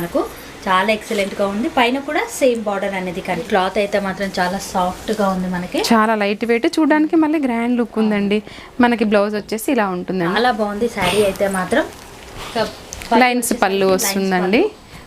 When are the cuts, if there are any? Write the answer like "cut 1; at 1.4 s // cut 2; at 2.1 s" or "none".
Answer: cut 1; at 3.4 s // cut 2; at 10.3 s